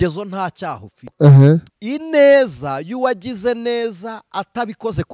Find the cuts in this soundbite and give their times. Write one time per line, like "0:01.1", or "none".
0:01.7